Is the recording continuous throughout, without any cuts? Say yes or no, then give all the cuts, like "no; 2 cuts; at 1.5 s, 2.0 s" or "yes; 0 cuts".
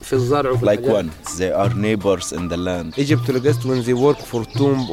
no; 2 cuts; at 1.3 s, 2.9 s